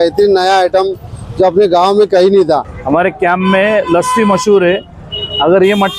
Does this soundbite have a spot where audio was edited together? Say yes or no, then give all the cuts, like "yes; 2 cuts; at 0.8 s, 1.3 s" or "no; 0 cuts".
yes; 1 cut; at 2.7 s